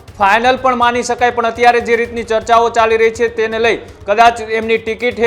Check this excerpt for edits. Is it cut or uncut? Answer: uncut